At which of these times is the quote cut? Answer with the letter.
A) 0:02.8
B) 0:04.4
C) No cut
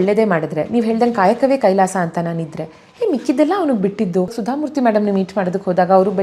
B